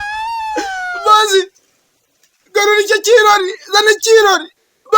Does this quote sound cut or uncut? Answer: cut